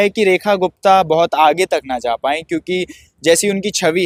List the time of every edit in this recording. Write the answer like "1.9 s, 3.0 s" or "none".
none